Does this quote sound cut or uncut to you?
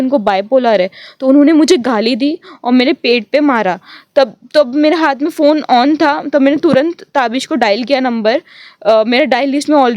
uncut